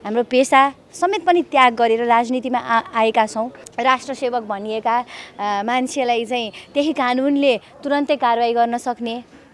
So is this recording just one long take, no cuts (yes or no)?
no